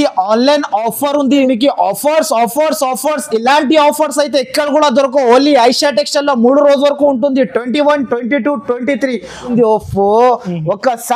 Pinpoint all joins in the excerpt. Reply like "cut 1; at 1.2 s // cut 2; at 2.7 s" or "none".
cut 1; at 1.4 s // cut 2; at 9.5 s